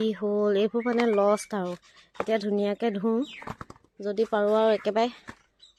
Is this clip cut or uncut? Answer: uncut